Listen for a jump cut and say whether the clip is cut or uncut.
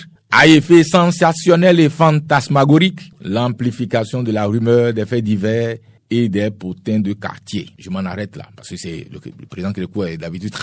cut